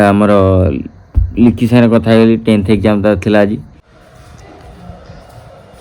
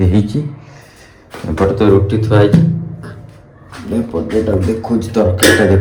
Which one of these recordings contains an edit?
first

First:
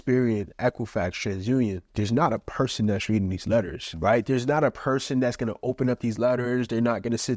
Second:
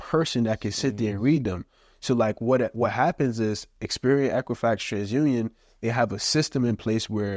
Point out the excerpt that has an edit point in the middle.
first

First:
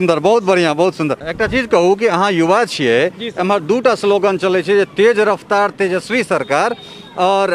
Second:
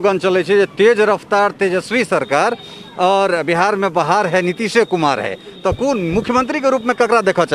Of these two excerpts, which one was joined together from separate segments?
first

